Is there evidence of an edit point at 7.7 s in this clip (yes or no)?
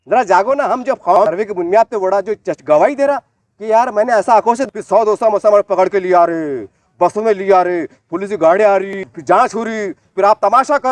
no